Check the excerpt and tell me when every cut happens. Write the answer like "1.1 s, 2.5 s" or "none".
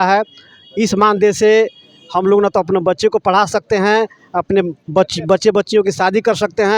none